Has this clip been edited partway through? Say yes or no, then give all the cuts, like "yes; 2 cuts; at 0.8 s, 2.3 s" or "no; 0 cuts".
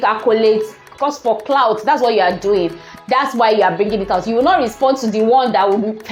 no; 0 cuts